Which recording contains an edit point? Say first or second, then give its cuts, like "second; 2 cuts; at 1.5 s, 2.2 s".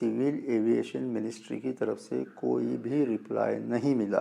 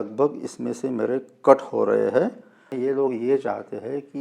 second; 1 cut; at 2.7 s